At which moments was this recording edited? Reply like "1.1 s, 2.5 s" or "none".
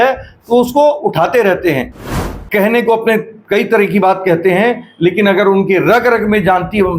2.0 s

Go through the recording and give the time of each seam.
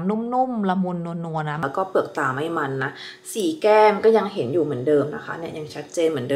1.6 s

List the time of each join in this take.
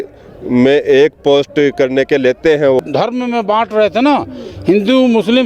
2.8 s

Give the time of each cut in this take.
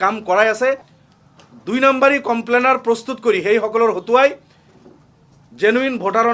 0.9 s

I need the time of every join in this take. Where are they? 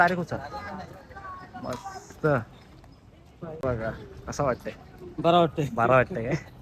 3.6 s

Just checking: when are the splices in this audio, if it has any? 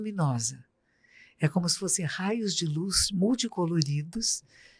none

